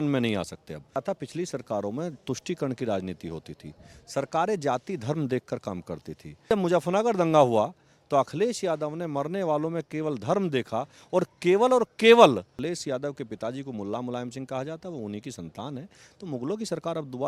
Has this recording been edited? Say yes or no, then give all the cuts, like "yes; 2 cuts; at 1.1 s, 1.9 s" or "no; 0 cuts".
yes; 3 cuts; at 1.0 s, 6.5 s, 12.6 s